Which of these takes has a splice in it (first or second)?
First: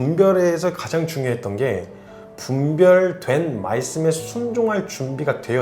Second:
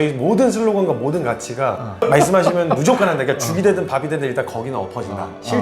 second